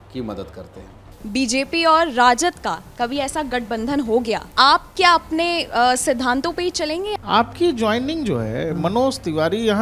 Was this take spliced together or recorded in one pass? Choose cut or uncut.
cut